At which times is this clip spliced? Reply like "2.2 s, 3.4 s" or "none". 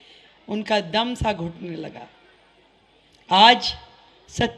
none